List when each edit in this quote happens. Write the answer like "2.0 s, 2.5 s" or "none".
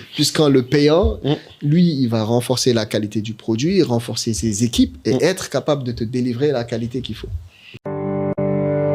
7.8 s